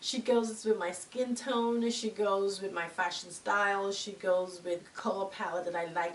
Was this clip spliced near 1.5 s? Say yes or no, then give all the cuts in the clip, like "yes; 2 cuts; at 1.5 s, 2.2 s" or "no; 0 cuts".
no; 1 cut; at 4.9 s